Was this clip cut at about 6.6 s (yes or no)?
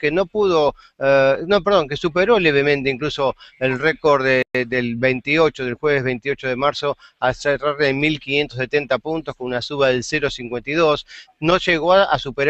yes